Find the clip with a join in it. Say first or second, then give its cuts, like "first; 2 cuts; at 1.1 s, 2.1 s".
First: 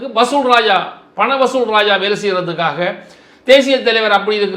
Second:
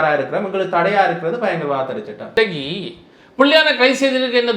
second; 1 cut; at 2.2 s